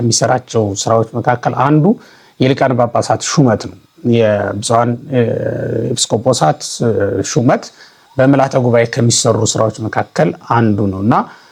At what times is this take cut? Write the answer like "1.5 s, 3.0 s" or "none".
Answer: none